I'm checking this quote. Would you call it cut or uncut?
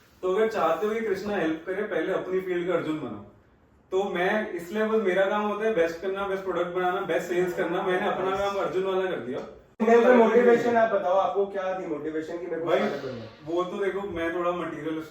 cut